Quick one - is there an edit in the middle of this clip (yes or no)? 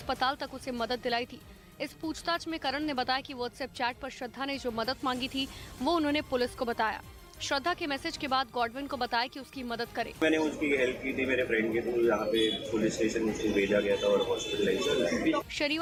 no